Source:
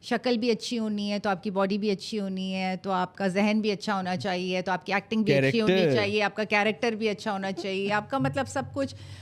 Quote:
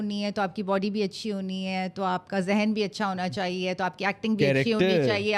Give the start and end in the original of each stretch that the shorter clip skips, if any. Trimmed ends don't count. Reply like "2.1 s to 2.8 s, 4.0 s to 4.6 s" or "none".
none